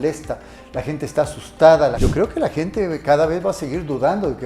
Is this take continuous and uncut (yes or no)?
no